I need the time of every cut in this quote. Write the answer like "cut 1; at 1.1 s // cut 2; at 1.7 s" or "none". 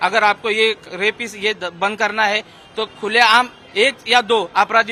none